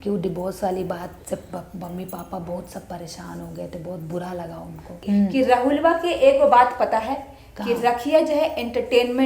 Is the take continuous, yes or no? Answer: no